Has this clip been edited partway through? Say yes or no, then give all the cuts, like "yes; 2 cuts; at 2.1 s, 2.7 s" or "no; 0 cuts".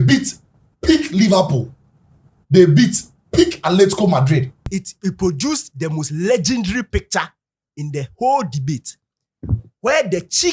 yes; 1 cut; at 4.6 s